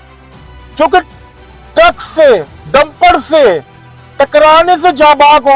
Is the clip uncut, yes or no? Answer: yes